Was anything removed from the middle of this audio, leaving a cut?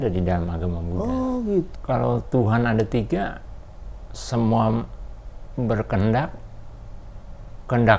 yes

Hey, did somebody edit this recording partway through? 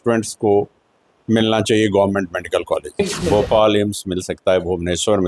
yes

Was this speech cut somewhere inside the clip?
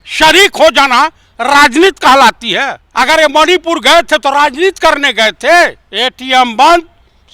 yes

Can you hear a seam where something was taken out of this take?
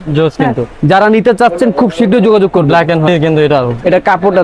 yes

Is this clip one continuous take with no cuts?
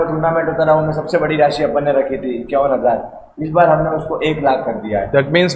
yes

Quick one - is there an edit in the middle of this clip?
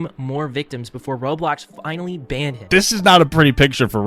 yes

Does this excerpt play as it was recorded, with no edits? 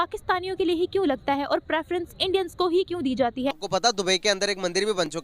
no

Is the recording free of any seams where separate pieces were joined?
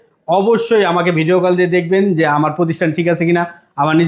yes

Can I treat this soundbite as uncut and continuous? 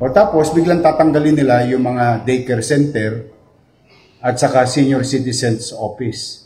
yes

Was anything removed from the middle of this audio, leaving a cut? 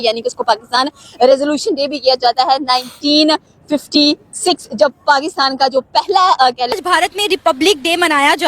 yes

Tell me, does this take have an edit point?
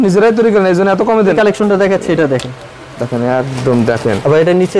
yes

